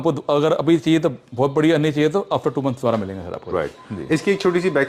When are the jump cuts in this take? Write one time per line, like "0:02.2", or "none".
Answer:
none